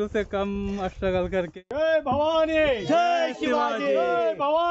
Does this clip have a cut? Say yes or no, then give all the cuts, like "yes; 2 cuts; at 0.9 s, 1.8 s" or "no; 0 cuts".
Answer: yes; 1 cut; at 1.5 s